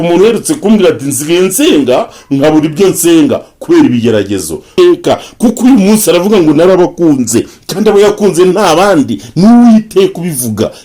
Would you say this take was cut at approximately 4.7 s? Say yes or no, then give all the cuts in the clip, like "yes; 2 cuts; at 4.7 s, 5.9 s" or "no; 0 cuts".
yes; 1 cut; at 4.7 s